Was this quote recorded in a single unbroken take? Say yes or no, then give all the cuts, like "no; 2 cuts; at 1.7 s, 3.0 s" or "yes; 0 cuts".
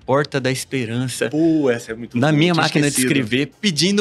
yes; 0 cuts